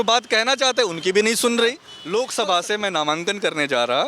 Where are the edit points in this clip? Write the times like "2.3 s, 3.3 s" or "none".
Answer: 1.9 s